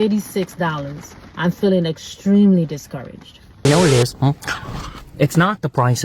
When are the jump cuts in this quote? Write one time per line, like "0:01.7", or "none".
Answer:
0:03.5